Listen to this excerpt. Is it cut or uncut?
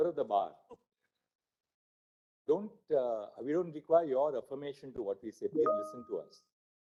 uncut